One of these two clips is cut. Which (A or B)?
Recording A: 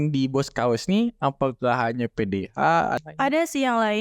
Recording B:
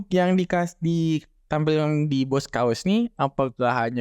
A